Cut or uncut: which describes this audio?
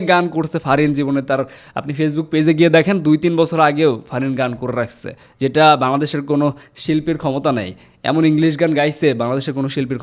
uncut